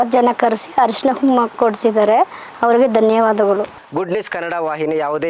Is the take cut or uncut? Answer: cut